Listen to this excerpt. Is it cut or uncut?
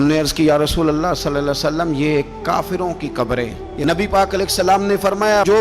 cut